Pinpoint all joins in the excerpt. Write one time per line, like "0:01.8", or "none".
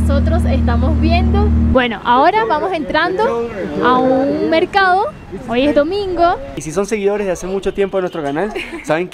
0:01.7
0:06.7